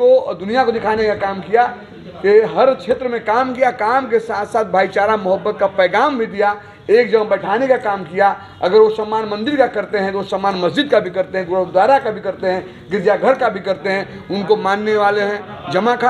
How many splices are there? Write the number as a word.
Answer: zero